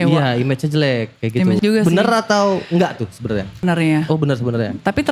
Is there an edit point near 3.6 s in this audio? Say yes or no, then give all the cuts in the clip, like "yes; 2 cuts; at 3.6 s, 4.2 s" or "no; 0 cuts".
yes; 2 cuts; at 1.6 s, 3.6 s